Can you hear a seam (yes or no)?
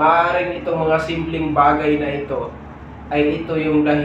no